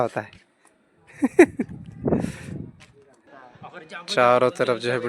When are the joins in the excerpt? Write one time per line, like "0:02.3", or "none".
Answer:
0:03.4